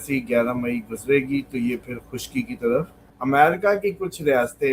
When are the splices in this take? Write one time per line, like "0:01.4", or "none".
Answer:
0:03.0